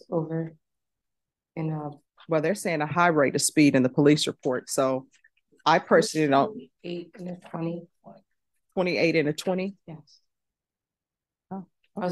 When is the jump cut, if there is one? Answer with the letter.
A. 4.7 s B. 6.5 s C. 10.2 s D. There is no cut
D